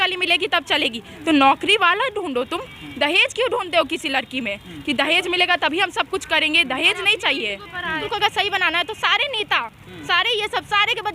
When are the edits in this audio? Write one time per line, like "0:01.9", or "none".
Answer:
0:08.0